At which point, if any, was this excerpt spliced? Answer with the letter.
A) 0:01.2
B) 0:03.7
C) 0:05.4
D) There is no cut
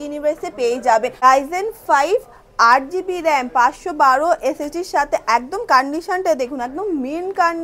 A